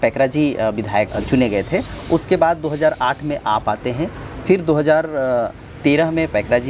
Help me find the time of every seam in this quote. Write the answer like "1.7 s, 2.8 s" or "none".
1.1 s